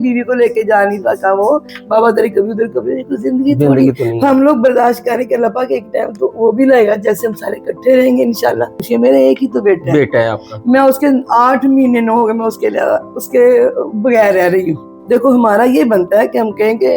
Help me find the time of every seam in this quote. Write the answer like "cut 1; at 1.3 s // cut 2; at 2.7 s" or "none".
cut 1; at 1.7 s // cut 2; at 8.8 s // cut 3; at 14.9 s